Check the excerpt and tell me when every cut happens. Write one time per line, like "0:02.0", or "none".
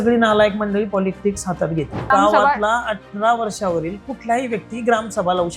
0:02.1